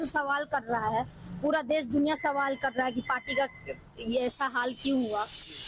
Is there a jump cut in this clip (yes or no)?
yes